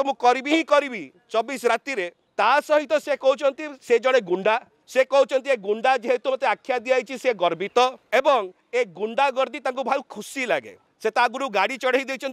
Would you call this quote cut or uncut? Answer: cut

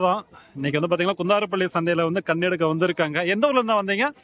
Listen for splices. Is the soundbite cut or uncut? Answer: uncut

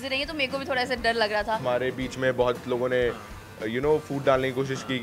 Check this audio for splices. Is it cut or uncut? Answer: cut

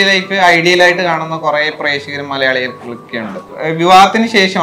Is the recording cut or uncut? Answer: cut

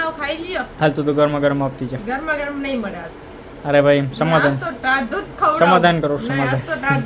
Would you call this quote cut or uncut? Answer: uncut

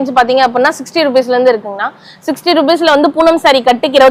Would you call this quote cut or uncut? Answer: uncut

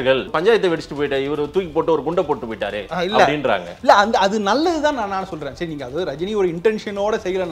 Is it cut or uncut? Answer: uncut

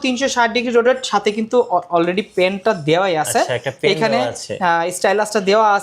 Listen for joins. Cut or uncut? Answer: uncut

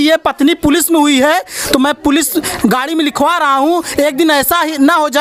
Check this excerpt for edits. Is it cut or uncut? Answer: uncut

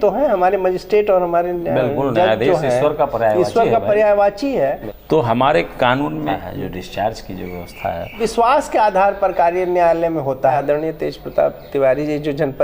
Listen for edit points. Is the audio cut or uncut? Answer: cut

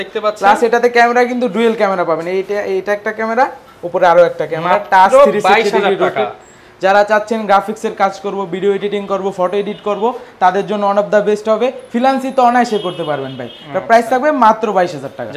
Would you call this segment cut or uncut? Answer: uncut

